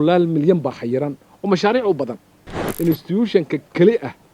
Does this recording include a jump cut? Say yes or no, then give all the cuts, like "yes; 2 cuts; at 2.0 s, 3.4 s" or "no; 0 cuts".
yes; 1 cut; at 2.6 s